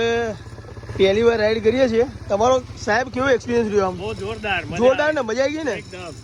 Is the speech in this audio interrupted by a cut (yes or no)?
no